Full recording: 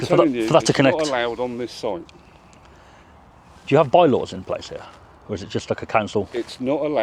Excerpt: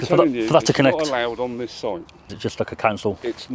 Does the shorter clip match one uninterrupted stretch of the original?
no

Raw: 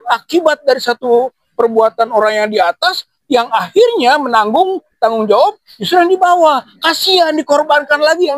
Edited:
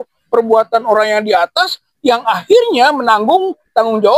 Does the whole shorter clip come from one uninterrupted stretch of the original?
yes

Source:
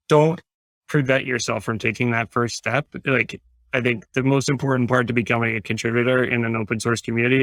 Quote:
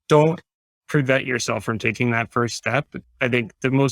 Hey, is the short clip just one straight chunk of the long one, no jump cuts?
no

